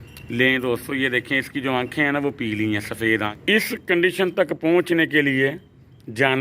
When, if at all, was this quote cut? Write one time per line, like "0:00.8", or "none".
0:03.3